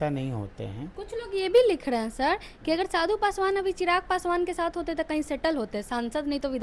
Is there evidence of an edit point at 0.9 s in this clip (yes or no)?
yes